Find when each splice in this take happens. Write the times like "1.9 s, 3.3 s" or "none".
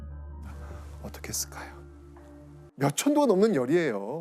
2.7 s